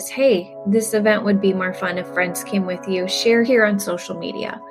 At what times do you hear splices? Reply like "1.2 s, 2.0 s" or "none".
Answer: 3.5 s